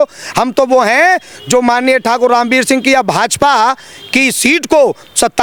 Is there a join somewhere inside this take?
no; 0 cuts

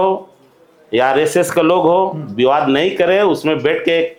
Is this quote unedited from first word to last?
yes; 0 cuts

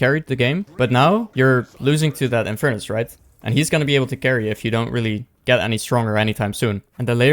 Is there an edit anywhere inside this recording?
no; 0 cuts

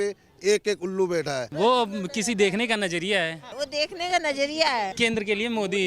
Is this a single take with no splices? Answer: no; 3 cuts; at 1.5 s, 3.5 s, 4.9 s

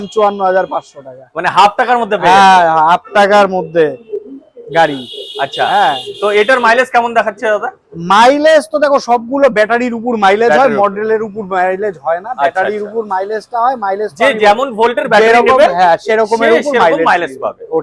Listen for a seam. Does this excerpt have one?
no; 0 cuts

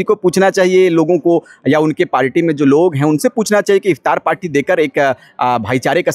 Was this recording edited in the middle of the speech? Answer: no; 0 cuts

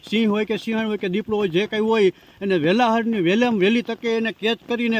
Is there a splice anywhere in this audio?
no; 0 cuts

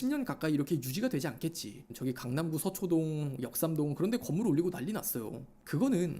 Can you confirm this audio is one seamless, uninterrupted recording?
no; 1 cut; at 1.9 s

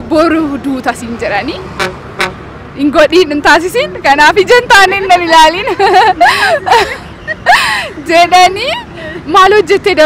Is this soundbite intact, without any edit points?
yes; 0 cuts

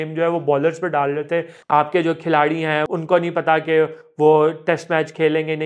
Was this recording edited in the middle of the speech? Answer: yes; 2 cuts; at 1.6 s, 2.8 s

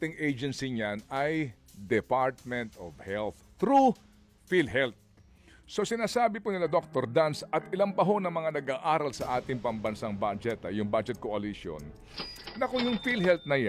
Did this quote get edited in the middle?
no; 0 cuts

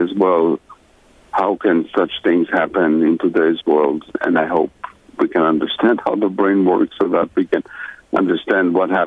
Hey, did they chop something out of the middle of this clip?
yes; 1 cut; at 4.2 s

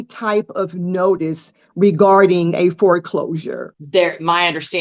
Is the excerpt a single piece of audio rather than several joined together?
no; 1 cut; at 3.6 s

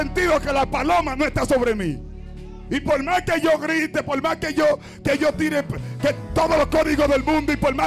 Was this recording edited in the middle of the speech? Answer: no; 0 cuts

